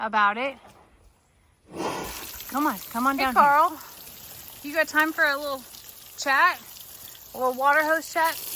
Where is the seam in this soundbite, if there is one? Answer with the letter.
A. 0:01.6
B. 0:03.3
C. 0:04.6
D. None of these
B